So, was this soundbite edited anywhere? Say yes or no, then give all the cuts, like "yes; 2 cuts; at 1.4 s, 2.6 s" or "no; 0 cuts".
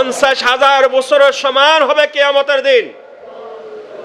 no; 0 cuts